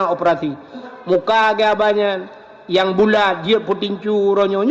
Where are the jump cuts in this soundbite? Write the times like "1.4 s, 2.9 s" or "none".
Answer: 0.9 s